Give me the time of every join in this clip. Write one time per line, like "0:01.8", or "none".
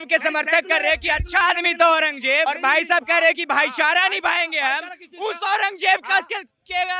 0:02.5

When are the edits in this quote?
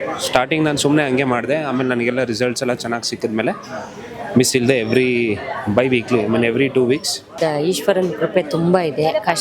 0:07.3

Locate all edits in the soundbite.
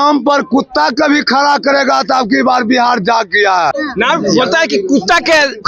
0:03.7

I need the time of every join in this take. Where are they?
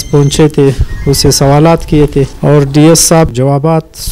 0:02.3
0:03.3

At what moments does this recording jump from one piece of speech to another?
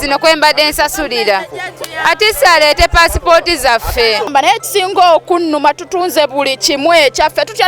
0:04.3

